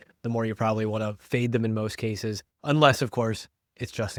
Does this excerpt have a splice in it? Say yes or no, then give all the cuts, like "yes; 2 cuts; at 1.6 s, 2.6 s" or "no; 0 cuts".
no; 0 cuts